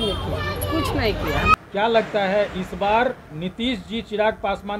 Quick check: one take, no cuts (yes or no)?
no